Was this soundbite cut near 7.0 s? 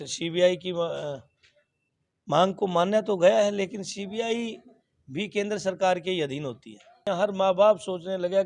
yes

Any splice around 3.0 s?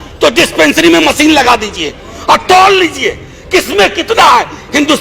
no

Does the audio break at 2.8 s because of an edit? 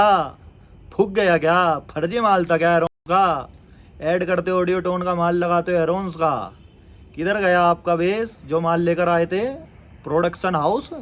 no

